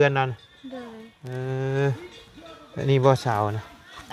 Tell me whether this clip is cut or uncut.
uncut